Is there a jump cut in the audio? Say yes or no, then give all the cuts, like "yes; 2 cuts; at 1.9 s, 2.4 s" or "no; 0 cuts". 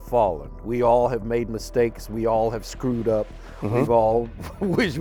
no; 0 cuts